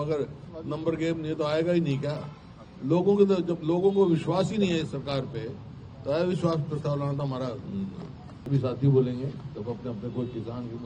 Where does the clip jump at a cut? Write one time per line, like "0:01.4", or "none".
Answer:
0:08.3